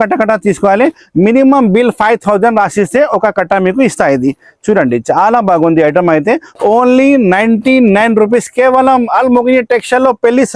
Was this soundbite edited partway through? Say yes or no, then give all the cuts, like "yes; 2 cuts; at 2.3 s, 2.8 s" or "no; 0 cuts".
no; 0 cuts